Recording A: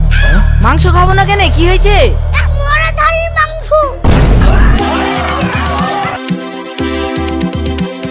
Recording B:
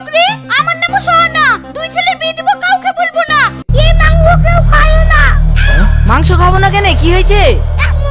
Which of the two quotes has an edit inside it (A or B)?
B